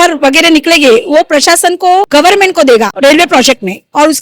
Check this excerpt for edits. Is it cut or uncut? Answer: cut